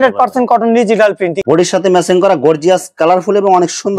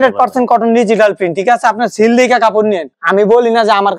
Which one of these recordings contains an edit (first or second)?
first